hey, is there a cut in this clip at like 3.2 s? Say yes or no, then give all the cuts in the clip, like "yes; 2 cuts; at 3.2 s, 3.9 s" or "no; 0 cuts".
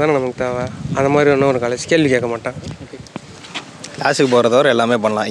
no; 0 cuts